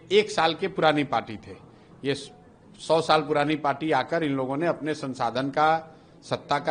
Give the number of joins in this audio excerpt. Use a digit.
0